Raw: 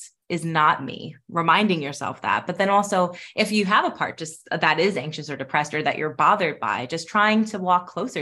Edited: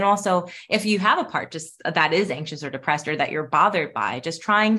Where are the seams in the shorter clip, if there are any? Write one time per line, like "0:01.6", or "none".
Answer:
none